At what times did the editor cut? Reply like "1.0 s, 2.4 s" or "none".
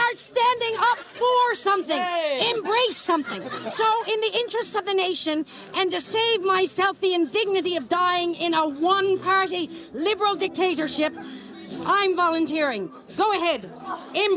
none